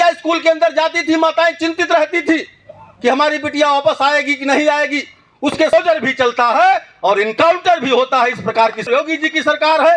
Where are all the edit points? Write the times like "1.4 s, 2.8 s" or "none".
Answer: 5.7 s, 8.9 s